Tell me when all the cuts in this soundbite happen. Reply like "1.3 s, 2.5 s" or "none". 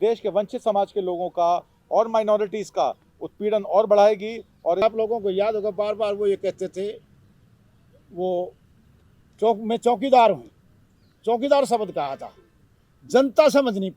4.8 s